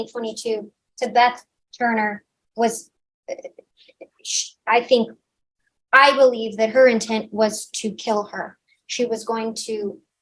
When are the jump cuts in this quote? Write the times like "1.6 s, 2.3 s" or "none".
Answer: none